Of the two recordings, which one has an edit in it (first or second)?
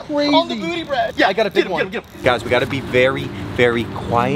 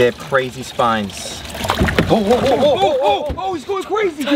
first